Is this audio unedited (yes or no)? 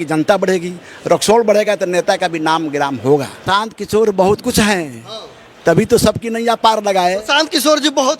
no